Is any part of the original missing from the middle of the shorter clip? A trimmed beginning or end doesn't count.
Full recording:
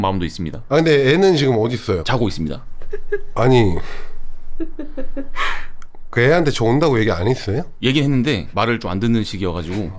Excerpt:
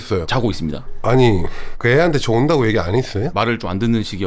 yes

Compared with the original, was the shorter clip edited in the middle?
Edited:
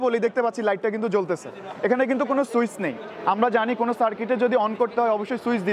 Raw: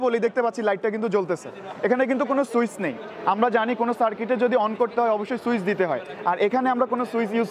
no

